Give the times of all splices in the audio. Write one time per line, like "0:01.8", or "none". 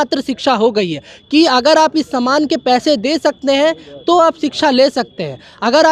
none